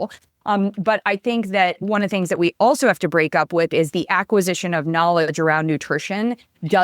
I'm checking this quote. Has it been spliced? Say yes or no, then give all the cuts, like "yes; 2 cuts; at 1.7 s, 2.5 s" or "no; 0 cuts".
yes; 1 cut; at 1.8 s